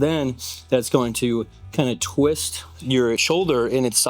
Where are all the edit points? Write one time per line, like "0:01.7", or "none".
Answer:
0:03.2